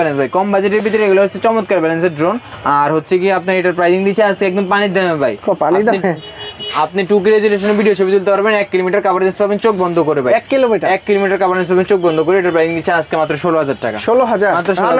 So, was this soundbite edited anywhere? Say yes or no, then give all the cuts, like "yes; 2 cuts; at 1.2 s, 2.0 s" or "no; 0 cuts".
no; 0 cuts